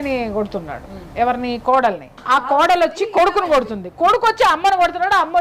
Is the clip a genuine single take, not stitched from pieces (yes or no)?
no